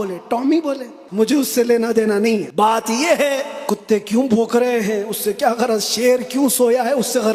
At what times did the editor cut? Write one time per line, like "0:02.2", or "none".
0:00.9
0:02.5
0:03.5